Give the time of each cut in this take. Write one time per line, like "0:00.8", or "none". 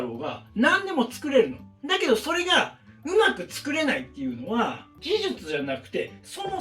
0:04.9